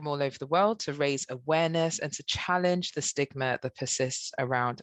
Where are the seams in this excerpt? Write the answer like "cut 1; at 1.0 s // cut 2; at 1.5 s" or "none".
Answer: none